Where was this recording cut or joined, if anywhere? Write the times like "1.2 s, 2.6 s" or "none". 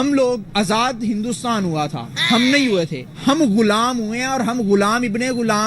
none